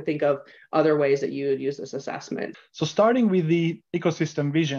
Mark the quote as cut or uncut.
cut